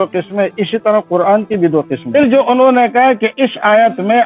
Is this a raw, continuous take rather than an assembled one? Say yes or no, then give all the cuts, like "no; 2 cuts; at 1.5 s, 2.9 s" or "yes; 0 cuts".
no; 1 cut; at 2.1 s